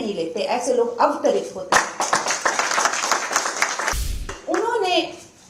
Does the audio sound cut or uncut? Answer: cut